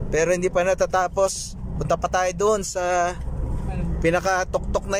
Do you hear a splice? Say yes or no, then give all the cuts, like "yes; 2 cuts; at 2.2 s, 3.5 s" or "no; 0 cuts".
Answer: no; 0 cuts